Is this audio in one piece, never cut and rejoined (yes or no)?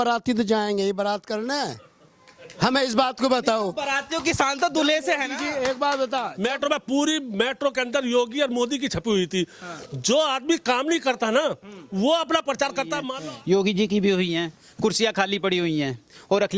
no